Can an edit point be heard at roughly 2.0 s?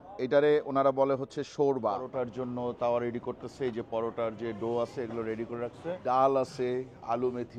yes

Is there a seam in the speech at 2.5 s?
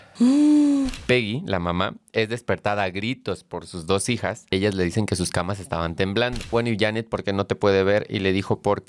no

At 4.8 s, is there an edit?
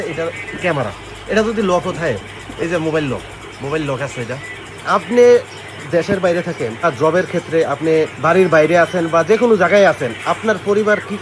yes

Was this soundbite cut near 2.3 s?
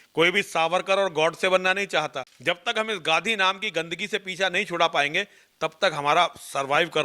yes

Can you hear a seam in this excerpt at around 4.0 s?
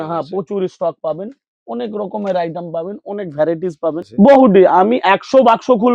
yes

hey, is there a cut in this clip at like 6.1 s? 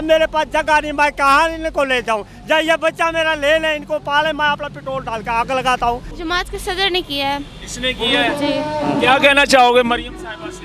yes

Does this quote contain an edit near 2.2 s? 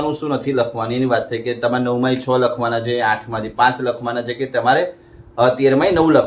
no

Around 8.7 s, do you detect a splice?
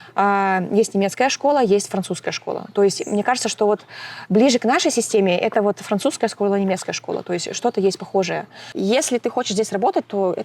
yes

